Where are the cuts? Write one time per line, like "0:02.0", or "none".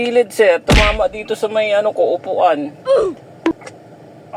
none